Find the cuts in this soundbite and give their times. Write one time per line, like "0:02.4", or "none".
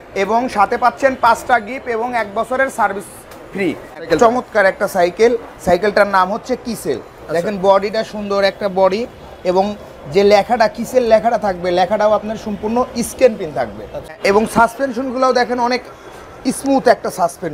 0:04.0
0:14.1